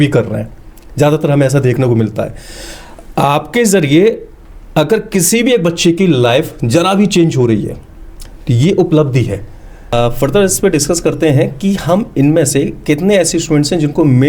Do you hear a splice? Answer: yes; 1 cut; at 9.9 s

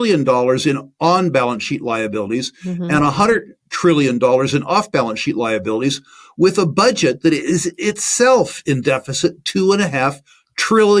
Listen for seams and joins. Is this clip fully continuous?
yes; 0 cuts

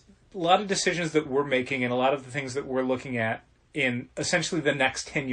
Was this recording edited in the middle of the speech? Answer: yes; 1 cut; at 4.1 s

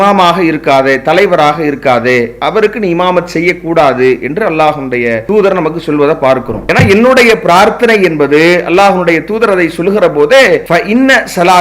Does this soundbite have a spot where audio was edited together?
yes; 2 cuts; at 5.2 s, 6.6 s

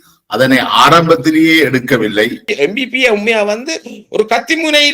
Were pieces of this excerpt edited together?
yes; 1 cut; at 2.4 s

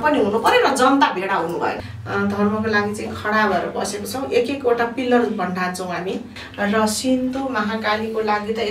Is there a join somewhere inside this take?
yes; 2 cuts; at 1.8 s, 6.4 s

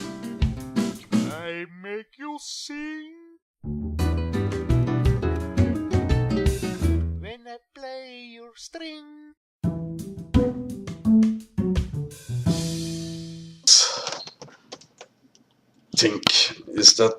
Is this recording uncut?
no; 1 cut; at 6.0 s

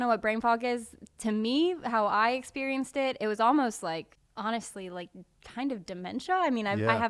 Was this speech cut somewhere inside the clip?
no; 0 cuts

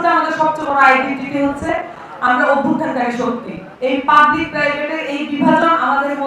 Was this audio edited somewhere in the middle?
yes; 1 cut; at 3.7 s

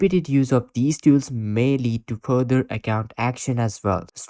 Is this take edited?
no; 0 cuts

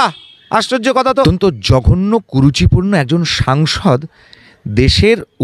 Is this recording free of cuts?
no; 1 cut; at 1.2 s

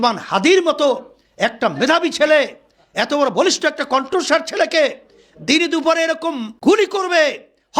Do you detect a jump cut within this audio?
yes; 1 cut; at 6.5 s

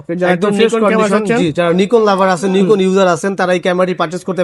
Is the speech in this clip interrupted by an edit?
no; 0 cuts

